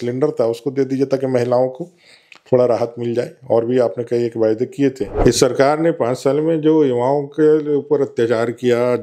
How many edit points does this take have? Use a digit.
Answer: 1